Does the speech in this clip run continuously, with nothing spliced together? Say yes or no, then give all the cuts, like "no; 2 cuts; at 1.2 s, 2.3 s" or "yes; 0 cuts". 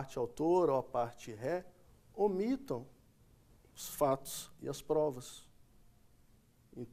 yes; 0 cuts